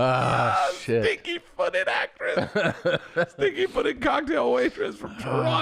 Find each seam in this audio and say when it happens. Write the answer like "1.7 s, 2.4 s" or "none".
none